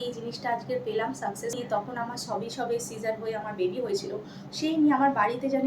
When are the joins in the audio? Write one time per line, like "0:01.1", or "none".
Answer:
0:01.6